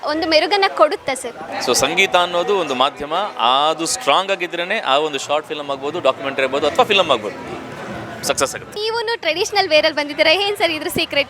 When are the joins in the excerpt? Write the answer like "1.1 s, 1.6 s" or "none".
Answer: 1.5 s, 8.8 s